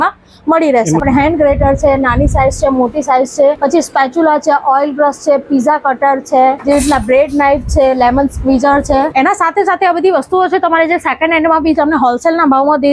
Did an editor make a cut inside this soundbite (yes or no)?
yes